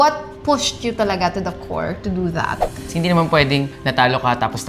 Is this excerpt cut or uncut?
cut